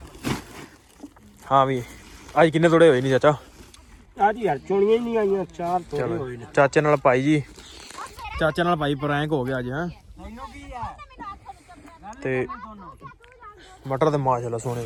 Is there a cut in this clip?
no; 0 cuts

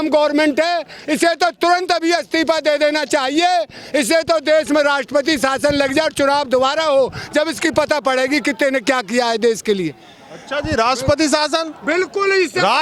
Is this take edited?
no; 0 cuts

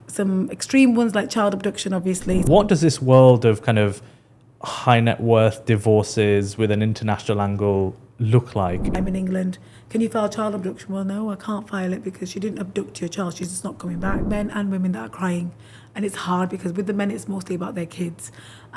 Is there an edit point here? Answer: yes; 3 cuts; at 2.5 s, 8.9 s, 14.2 s

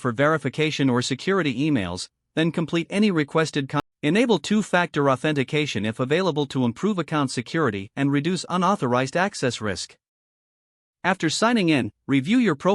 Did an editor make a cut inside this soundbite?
yes; 1 cut; at 3.8 s

